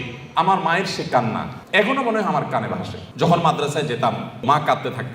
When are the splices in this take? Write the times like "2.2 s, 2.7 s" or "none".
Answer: 1.5 s, 3.0 s, 4.4 s